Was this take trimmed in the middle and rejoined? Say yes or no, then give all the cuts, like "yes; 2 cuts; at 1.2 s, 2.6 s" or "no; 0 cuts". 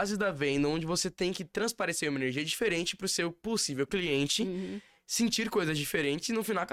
no; 0 cuts